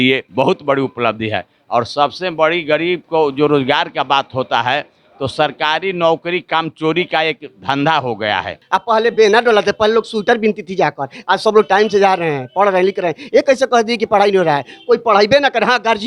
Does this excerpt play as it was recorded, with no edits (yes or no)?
no